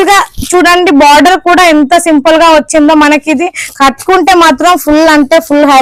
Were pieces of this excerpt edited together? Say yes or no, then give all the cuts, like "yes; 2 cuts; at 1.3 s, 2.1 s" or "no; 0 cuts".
no; 0 cuts